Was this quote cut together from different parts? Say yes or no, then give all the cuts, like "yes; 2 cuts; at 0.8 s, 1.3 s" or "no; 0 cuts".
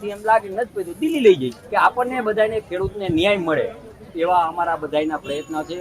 yes; 1 cut; at 1.6 s